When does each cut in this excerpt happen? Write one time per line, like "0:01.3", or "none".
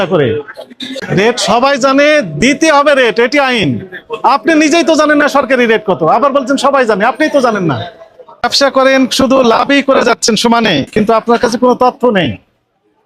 0:01.0
0:08.4